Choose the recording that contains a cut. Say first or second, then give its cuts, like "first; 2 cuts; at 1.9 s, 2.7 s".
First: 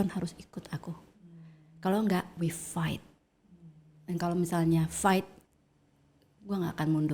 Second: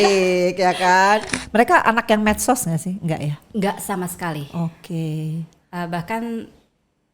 second; 1 cut; at 1.4 s